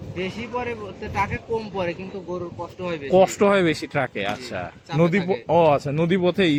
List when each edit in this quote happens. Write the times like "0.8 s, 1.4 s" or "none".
none